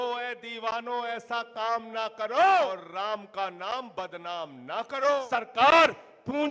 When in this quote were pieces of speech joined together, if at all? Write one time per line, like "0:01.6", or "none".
0:02.7
0:05.2